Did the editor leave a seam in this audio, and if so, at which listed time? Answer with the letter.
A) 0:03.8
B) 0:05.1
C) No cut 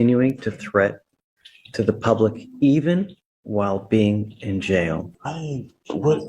B